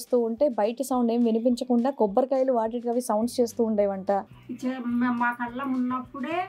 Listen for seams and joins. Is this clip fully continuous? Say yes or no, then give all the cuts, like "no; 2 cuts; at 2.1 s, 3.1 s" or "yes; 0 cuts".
no; 1 cut; at 4.4 s